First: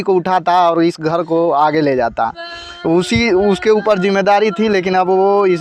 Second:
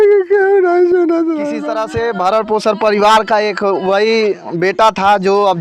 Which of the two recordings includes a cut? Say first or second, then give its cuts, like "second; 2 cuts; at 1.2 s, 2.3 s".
second; 1 cut; at 1.7 s